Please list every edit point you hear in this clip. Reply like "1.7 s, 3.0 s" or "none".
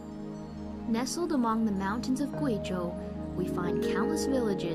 1.7 s